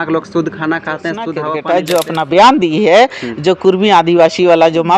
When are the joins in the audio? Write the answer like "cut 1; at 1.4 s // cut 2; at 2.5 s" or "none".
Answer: cut 1; at 1.7 s